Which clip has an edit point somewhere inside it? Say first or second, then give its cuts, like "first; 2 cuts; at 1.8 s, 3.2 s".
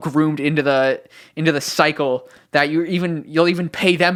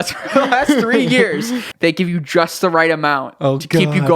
second; 1 cut; at 1.6 s